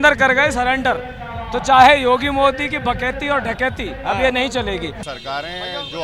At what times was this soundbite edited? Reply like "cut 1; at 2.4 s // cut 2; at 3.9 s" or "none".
cut 1; at 5.0 s